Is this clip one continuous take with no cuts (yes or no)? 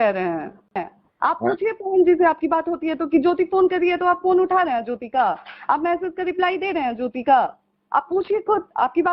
no